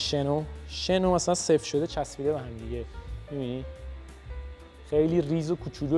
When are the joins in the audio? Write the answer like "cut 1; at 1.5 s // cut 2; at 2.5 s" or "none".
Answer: none